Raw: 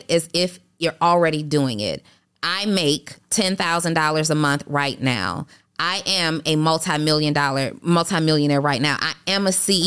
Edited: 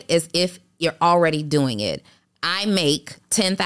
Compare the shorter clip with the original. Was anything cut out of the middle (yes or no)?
no